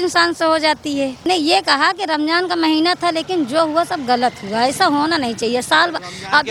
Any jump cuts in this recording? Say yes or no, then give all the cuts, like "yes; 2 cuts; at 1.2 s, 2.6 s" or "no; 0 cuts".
yes; 1 cut; at 1.3 s